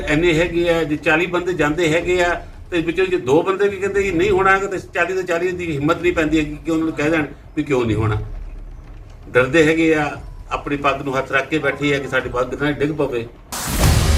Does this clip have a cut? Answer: no; 0 cuts

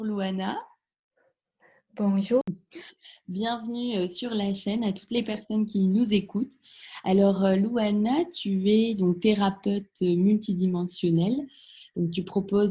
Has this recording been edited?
yes; 1 cut; at 2.4 s

